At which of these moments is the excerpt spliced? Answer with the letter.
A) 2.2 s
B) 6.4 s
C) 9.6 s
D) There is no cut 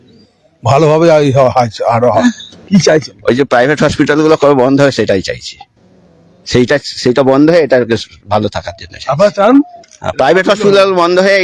A